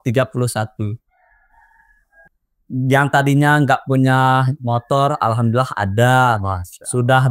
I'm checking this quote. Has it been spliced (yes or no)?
yes